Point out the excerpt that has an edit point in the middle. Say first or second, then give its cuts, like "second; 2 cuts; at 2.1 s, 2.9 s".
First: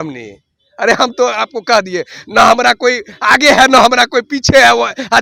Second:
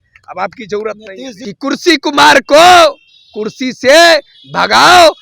second; 1 cut; at 1.4 s